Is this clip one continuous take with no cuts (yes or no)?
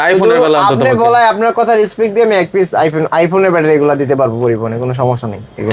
yes